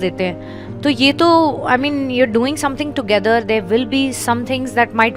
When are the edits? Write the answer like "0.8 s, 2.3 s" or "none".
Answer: none